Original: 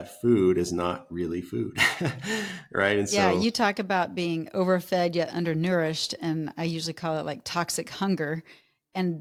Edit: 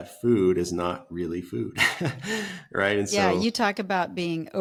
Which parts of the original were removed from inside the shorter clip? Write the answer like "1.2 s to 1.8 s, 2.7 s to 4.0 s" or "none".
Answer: none